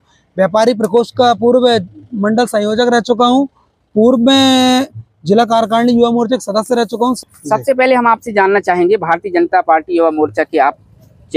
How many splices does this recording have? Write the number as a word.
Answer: one